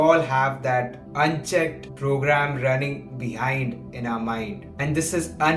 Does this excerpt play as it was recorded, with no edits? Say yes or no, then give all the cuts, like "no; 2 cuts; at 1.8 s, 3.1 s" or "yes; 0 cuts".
no; 3 cuts; at 1.0 s, 1.9 s, 4.6 s